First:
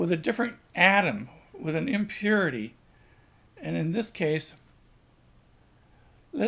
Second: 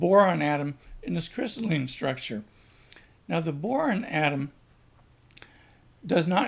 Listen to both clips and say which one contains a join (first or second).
first